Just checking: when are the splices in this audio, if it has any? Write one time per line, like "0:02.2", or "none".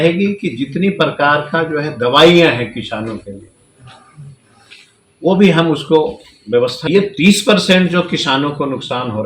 0:06.8